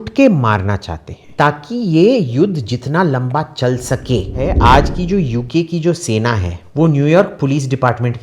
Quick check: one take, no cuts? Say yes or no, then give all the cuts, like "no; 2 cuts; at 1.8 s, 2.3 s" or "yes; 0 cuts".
no; 3 cuts; at 1.2 s, 4.4 s, 6.6 s